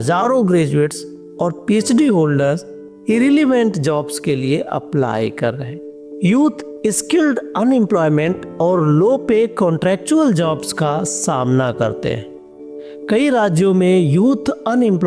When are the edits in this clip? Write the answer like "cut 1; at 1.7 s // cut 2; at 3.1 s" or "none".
none